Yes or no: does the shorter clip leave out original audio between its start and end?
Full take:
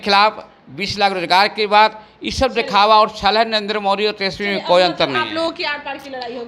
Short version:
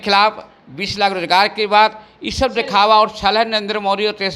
no